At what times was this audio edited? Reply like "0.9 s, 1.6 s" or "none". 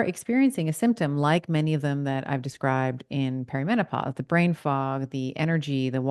none